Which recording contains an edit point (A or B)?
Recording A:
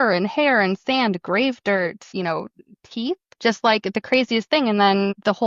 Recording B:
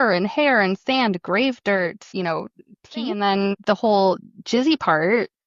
B